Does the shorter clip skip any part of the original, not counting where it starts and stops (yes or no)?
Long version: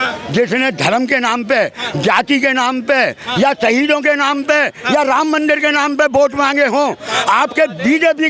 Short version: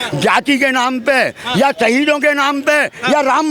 no